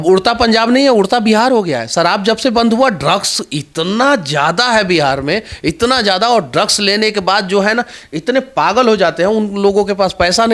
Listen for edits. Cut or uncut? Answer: uncut